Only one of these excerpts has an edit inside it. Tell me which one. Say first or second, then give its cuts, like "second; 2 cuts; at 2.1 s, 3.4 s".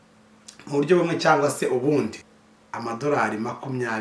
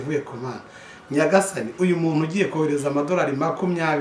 first; 1 cut; at 2.2 s